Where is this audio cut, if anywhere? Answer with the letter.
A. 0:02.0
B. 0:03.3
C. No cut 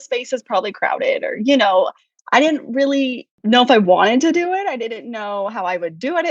B